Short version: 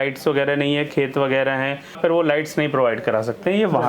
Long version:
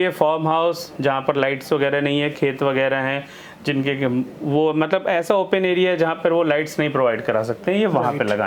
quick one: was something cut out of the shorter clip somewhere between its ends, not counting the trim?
yes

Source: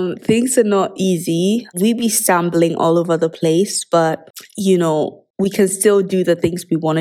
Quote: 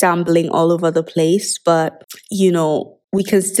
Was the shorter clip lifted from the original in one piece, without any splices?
yes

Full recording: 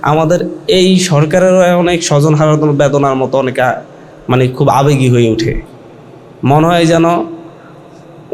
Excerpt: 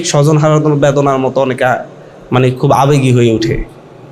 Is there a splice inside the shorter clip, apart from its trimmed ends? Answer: no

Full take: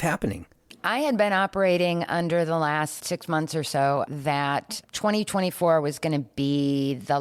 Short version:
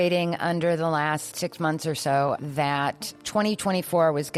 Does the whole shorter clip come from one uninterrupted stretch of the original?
yes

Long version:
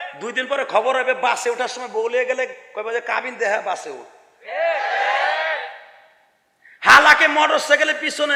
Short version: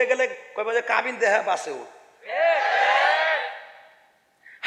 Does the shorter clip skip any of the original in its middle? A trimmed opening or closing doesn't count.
no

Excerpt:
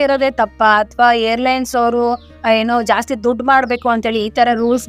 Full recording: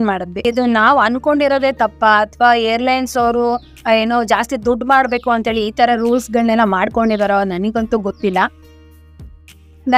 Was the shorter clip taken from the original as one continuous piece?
yes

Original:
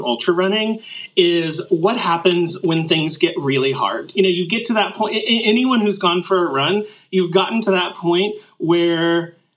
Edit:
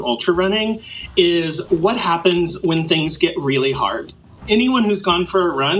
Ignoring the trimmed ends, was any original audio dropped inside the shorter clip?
yes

